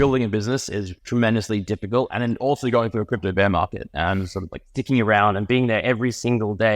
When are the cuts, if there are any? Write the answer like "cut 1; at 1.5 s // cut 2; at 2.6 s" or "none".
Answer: cut 1; at 1.0 s // cut 2; at 2.1 s